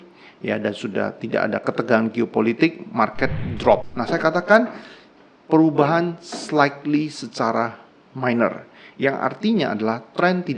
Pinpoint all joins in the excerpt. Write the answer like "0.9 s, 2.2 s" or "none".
3.9 s